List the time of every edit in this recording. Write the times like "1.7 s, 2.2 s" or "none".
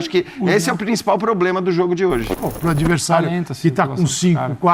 2.3 s